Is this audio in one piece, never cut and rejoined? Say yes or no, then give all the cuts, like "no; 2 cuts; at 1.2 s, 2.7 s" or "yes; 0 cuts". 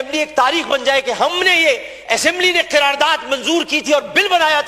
yes; 0 cuts